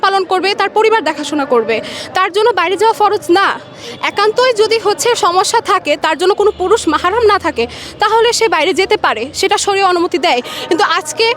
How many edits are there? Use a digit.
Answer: 0